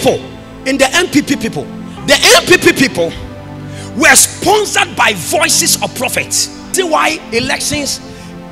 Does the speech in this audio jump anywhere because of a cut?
yes; 1 cut; at 6.7 s

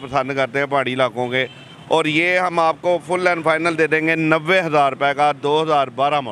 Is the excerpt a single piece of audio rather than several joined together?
yes; 0 cuts

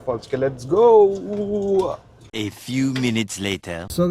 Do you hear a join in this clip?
yes; 1 cut; at 2.3 s

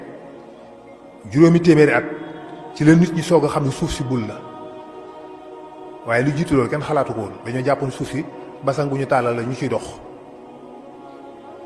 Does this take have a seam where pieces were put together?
no; 0 cuts

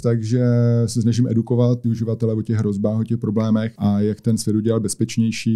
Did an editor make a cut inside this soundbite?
yes; 2 cuts; at 1.8 s, 3.7 s

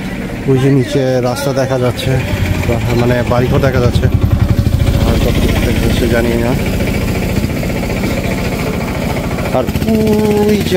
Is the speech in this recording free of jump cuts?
yes; 0 cuts

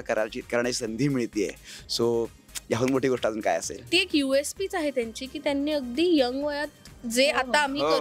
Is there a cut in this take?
yes; 1 cut; at 3.8 s

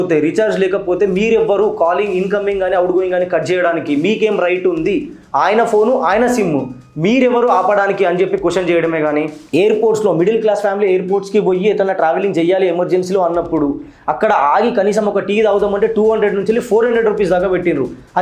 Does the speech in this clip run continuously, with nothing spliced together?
no; 1 cut; at 9.4 s

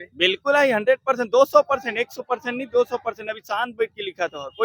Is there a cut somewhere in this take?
no; 0 cuts

